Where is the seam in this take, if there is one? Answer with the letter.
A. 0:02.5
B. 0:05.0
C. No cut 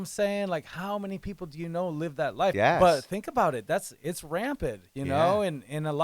A